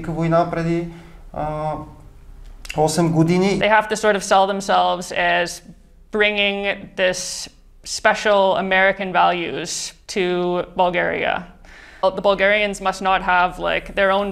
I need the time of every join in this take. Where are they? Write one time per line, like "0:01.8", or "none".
0:03.6
0:12.0